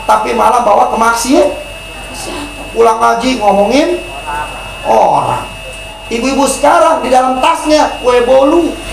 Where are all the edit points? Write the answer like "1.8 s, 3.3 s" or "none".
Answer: 5.9 s